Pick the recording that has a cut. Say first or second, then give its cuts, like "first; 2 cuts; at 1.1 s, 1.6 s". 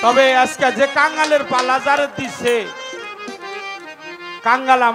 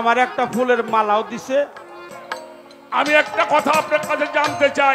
second; 1 cut; at 2.1 s